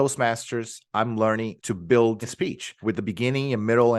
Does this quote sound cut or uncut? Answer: cut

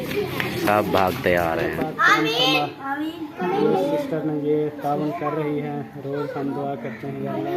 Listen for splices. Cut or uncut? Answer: cut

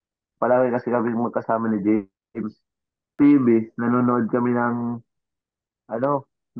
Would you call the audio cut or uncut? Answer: cut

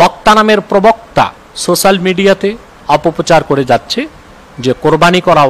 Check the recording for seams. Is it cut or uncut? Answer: cut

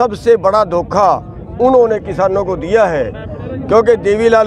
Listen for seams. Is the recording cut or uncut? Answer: uncut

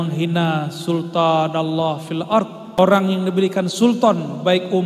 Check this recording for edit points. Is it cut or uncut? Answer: cut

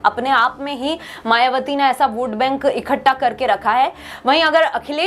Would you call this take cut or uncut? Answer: uncut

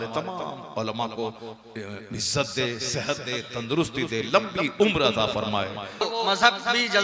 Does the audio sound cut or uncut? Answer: cut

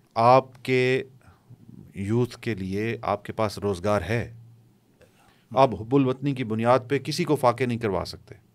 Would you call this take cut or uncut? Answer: cut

